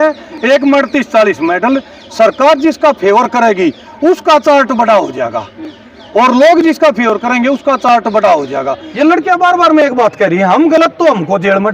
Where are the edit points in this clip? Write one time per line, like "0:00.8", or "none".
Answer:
0:08.8